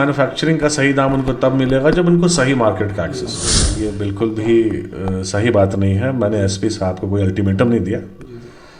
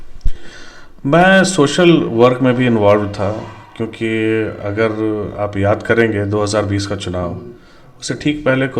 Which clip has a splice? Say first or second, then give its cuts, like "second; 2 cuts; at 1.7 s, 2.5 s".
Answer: first; 1 cut; at 3.7 s